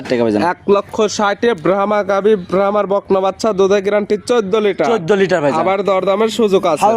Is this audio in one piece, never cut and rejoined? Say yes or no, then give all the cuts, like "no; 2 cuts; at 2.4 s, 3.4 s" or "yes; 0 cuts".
yes; 0 cuts